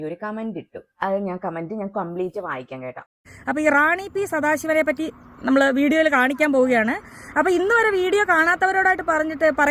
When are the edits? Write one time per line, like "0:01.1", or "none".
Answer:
0:03.2